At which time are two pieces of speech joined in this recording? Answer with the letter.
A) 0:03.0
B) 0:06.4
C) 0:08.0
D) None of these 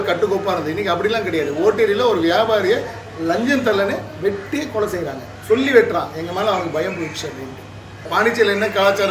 C